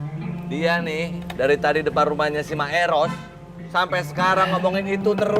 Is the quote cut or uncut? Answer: uncut